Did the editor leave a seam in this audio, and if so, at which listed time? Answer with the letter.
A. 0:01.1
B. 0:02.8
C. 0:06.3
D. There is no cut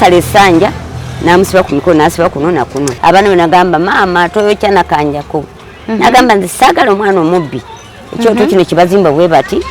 B